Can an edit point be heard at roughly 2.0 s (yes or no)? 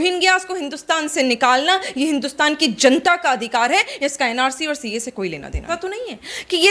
no